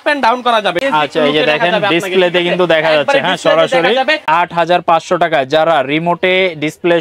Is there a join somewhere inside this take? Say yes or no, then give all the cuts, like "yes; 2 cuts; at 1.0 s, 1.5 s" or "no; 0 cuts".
yes; 2 cuts; at 0.8 s, 4.3 s